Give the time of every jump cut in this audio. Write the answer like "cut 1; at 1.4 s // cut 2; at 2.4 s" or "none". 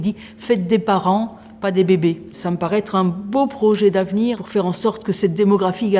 cut 1; at 4.4 s